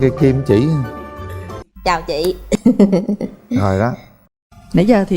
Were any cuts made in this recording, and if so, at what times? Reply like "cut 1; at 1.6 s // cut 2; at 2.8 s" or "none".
cut 1; at 1.6 s